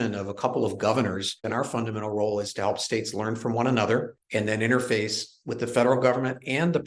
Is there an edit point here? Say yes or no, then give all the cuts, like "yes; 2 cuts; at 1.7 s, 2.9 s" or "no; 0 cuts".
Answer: yes; 2 cuts; at 1.4 s, 4.2 s